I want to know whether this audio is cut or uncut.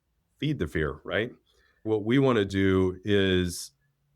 cut